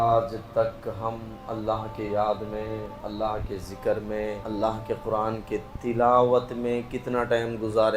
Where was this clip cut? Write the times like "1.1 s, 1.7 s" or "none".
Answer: 3.0 s, 4.4 s